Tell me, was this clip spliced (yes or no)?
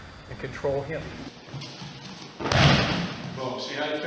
yes